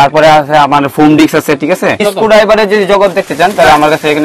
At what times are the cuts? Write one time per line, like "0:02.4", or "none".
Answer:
0:02.0